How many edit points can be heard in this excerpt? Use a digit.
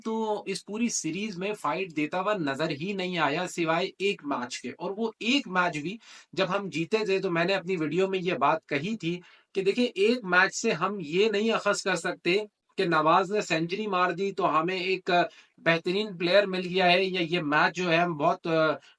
0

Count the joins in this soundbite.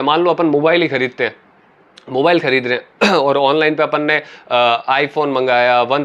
0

